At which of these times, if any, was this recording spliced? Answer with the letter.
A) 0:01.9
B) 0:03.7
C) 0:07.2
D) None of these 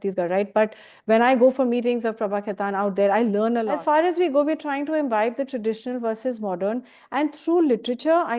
B